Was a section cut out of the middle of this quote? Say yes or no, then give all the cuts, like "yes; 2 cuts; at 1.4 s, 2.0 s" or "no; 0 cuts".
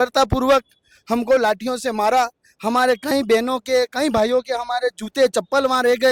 no; 0 cuts